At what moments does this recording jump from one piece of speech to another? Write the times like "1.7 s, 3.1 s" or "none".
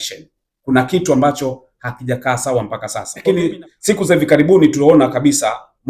3.4 s